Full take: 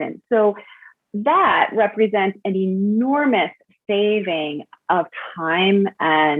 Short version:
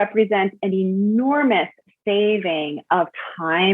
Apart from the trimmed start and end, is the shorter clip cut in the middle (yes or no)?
yes